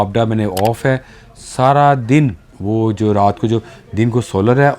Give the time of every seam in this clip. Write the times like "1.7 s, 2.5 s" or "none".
2.5 s